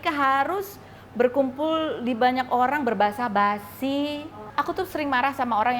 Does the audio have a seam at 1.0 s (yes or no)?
no